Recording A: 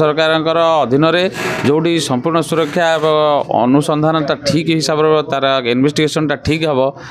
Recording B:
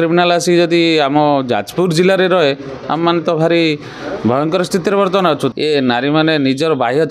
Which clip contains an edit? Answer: B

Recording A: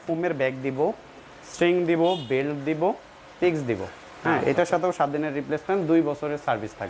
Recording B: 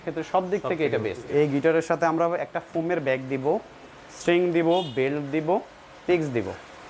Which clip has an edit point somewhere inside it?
B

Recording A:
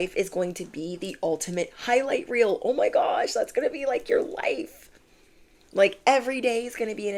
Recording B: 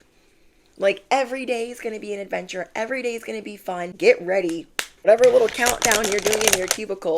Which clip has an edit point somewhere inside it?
B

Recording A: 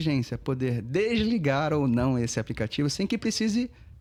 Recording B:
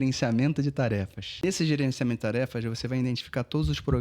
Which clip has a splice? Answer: B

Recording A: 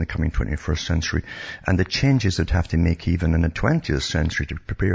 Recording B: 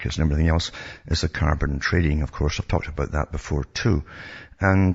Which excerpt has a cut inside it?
A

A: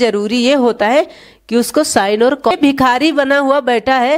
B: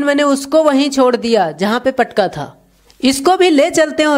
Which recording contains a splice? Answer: A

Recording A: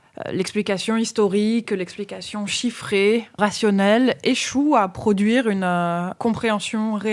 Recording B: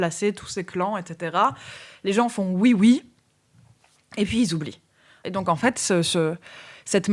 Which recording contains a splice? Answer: A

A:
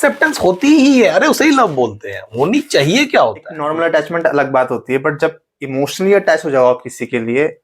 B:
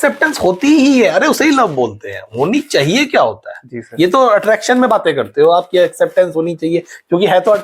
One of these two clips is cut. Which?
A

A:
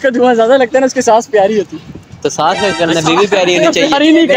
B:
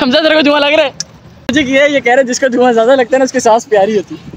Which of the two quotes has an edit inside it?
B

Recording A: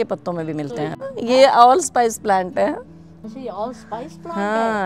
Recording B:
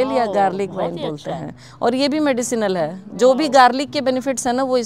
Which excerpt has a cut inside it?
A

